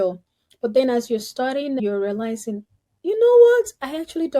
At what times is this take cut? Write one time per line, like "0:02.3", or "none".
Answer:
0:01.8